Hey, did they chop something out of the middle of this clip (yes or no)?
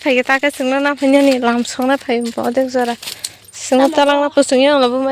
no